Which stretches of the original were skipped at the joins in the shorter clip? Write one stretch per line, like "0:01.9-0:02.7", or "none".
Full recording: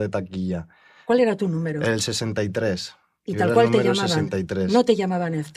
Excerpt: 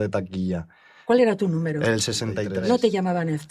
0:02.5-0:04.5